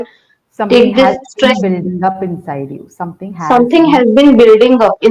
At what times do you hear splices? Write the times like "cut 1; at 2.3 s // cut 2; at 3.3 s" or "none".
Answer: none